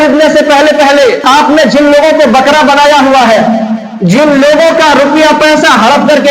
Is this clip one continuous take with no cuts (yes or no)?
no